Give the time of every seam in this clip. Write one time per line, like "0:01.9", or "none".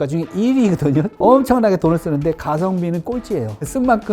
0:01.1